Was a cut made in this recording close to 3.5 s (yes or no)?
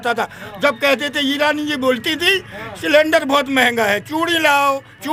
no